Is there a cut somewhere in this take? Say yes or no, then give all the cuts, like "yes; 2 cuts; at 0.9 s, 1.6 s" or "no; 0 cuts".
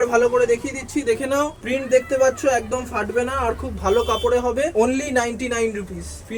no; 0 cuts